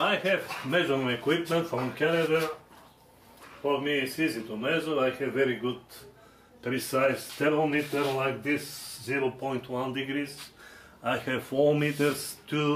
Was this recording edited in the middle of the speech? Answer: yes; 1 cut; at 10.9 s

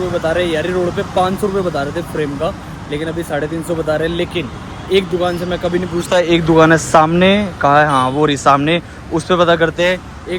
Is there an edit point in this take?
no; 0 cuts

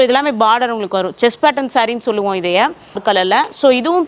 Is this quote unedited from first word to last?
no; 1 cut; at 3.0 s

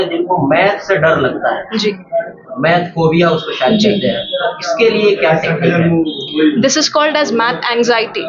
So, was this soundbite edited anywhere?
no; 0 cuts

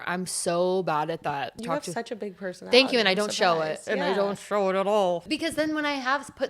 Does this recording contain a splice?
yes; 2 cuts; at 1.5 s, 5.2 s

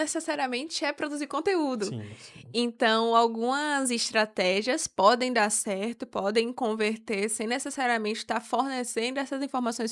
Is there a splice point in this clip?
no; 0 cuts

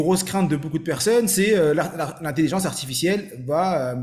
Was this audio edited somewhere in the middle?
no; 0 cuts

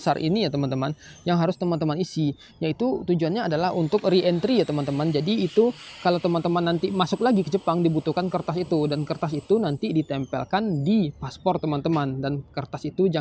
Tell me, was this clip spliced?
no; 0 cuts

